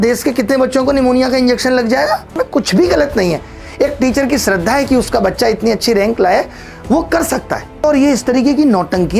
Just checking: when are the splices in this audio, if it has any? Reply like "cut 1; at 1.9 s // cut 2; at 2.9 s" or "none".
cut 1; at 2.3 s // cut 2; at 7.8 s

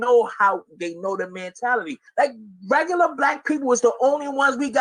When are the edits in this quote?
cut 1; at 1.8 s

